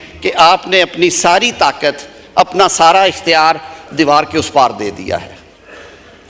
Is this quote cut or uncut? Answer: uncut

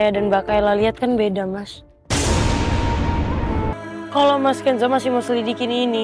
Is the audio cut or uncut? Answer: cut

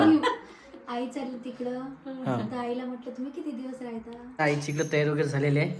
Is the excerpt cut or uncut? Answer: cut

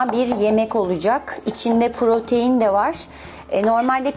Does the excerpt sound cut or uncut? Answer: uncut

